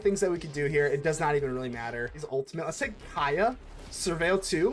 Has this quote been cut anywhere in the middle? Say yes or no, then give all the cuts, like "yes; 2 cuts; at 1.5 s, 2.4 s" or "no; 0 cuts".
yes; 1 cut; at 2.2 s